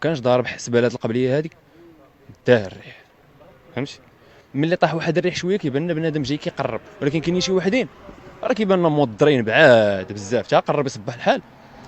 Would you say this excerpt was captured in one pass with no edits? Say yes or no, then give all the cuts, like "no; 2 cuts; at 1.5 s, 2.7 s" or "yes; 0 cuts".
yes; 0 cuts